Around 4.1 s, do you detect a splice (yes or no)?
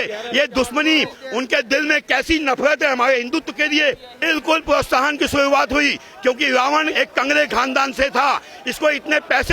yes